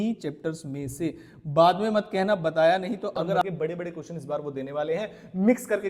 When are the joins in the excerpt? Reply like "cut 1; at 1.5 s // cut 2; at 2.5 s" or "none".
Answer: cut 1; at 3.4 s